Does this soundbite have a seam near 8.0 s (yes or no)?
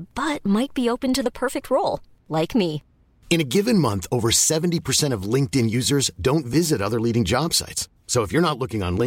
no